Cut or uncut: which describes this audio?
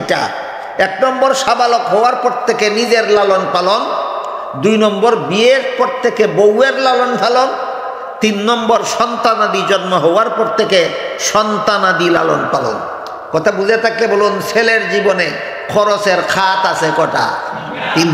uncut